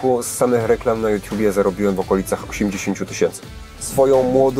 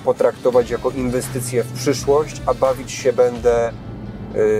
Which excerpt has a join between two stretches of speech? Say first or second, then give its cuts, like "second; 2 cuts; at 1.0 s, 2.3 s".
first; 1 cut; at 3.4 s